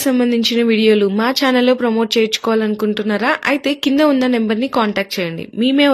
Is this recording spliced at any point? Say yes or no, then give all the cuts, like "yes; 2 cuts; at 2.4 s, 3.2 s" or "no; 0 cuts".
no; 0 cuts